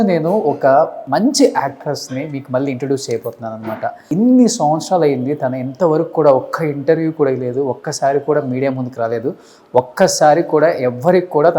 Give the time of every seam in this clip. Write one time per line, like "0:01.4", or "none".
0:01.0
0:04.0